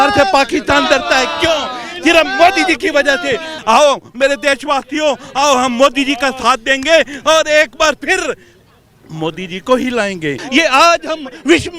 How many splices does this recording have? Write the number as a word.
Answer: two